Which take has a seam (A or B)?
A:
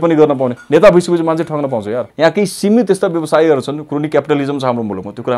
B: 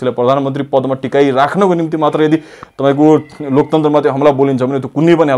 A